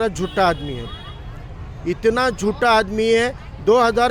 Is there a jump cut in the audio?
no; 0 cuts

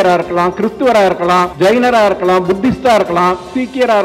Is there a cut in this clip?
yes; 1 cut; at 1.5 s

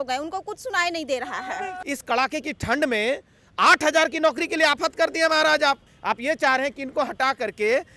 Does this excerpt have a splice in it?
yes; 2 cuts; at 1.7 s, 5.9 s

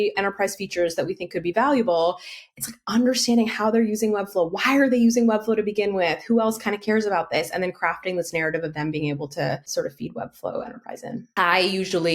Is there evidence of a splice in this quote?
yes; 2 cuts; at 9.7 s, 11.2 s

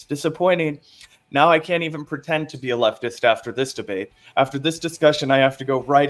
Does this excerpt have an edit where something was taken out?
no; 0 cuts

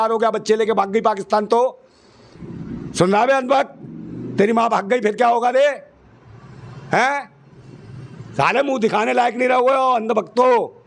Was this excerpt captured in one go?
yes; 0 cuts

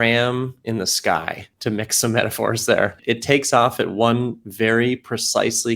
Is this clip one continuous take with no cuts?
no; 2 cuts; at 1.4 s, 3.0 s

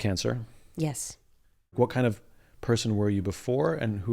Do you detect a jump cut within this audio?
yes; 1 cut; at 1.8 s

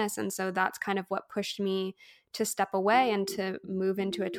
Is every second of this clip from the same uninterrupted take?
yes; 0 cuts

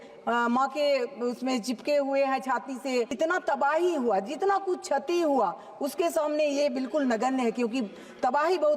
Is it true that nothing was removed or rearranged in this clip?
no; 1 cut; at 3.1 s

